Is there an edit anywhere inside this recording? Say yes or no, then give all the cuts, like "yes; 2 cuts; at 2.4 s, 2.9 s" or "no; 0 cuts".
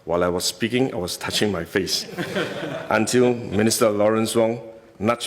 no; 0 cuts